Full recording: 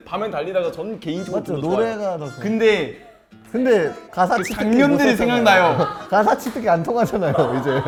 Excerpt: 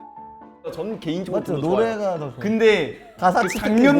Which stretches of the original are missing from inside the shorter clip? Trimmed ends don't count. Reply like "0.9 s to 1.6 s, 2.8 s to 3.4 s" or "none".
3.1 s to 4.0 s